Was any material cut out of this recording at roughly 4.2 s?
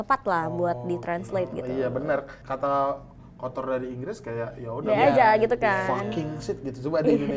no; 1 cut; at 2.4 s

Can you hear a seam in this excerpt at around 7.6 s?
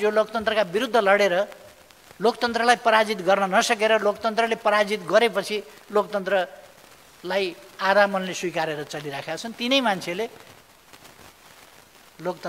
no; 0 cuts

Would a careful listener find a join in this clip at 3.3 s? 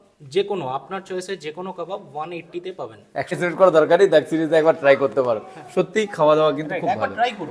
yes; 1 cut; at 3.3 s

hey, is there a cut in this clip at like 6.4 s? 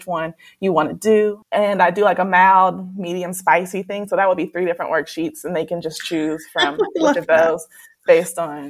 no; 1 cut; at 1.4 s

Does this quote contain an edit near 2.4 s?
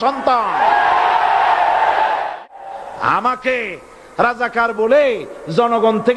yes; 1 cut; at 2.4 s

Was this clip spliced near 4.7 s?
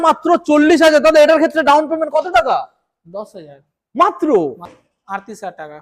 yes; 1 cut; at 4.7 s

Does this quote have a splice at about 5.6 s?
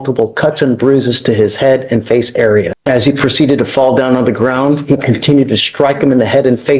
no; 1 cut; at 2.7 s

